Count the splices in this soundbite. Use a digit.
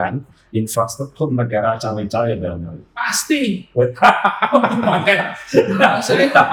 0